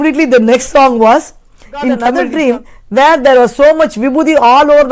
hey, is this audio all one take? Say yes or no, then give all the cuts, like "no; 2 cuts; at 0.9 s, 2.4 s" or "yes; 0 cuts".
no; 1 cut; at 2.2 s